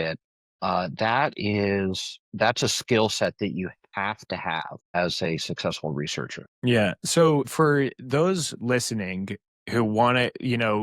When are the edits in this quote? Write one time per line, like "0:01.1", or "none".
0:05.0
0:06.4
0:07.5